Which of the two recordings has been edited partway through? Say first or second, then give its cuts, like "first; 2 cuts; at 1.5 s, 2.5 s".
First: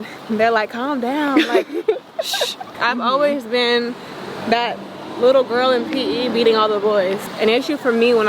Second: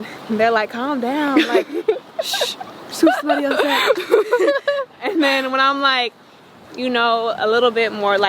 first; 2 cuts; at 2.8 s, 7.2 s